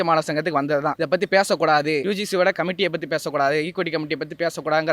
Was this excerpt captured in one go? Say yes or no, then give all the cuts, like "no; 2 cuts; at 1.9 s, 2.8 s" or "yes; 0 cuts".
no; 2 cuts; at 1.0 s, 2.5 s